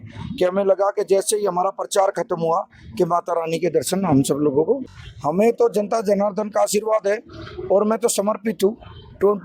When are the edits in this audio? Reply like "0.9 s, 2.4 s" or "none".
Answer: 4.9 s